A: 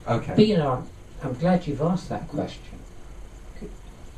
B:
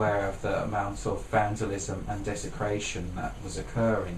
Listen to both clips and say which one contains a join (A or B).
A